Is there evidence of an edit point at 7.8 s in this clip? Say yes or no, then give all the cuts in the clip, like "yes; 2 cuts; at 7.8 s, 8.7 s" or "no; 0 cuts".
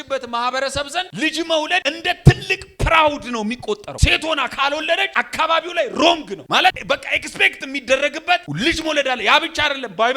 no; 5 cuts; at 1.1 s, 1.8 s, 3.9 s, 5.1 s, 6.5 s